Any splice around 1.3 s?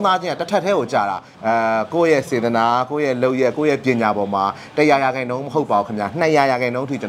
yes; 1 cut; at 1.3 s

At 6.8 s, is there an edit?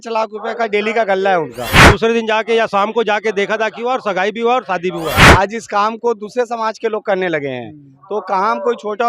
no; 2 cuts; at 1.9 s, 5.2 s

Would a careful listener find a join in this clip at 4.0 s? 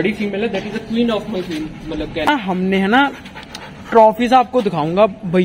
no; 1 cut; at 2.3 s

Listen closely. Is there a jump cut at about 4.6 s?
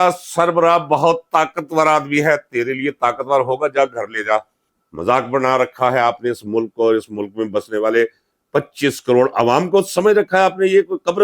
yes; 1 cut; at 4.6 s

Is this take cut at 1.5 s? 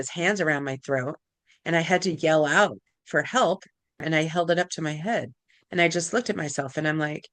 no; 1 cut; at 4.0 s

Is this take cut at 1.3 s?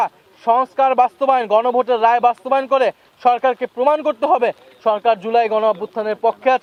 no; 0 cuts

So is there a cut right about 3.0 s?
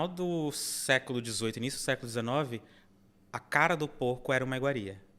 no; 0 cuts

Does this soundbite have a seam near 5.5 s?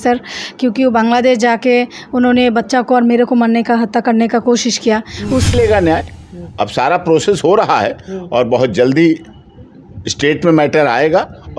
yes; 1 cut; at 5.5 s

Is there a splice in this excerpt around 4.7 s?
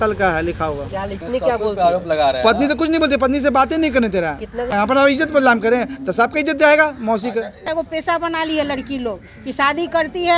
yes; 3 cuts; at 1.2 s, 4.7 s, 7.6 s

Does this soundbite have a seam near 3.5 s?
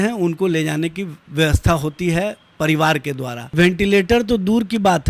yes; 1 cut; at 3.5 s

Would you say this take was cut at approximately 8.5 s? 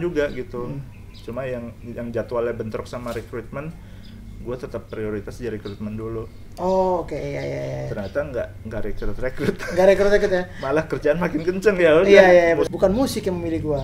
no; 1 cut; at 12.7 s

